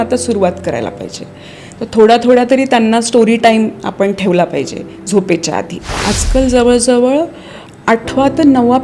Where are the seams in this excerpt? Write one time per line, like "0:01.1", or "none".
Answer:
0:05.8

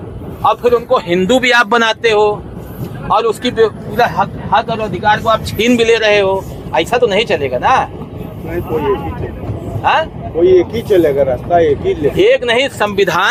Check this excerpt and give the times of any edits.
none

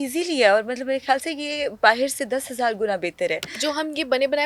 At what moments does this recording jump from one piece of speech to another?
none

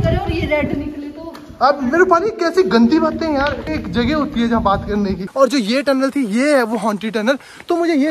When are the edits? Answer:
0:03.7
0:05.2

